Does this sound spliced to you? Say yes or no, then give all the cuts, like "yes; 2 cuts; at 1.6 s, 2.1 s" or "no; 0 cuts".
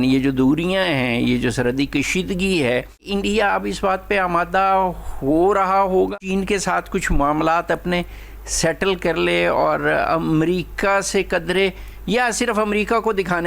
yes; 2 cuts; at 3.1 s, 6.1 s